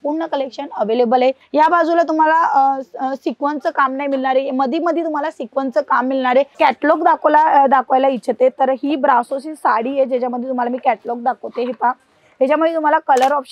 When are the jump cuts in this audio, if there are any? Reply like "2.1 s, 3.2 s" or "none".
1.4 s, 6.5 s